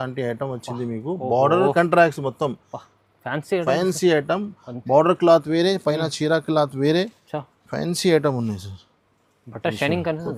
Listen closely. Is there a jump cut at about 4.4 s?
no; 0 cuts

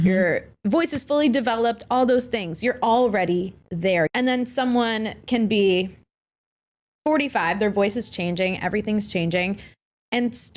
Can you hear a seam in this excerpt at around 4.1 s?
yes; 1 cut; at 4.1 s

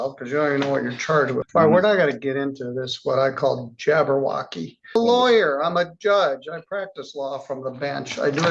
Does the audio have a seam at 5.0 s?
yes; 2 cuts; at 1.4 s, 5.0 s

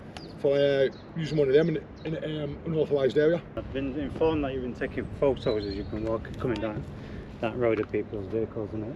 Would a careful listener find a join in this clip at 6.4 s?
no; 1 cut; at 3.6 s

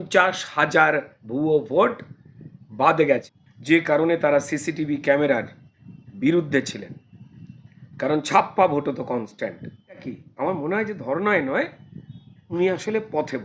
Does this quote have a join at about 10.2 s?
yes; 2 cuts; at 3.4 s, 10.2 s

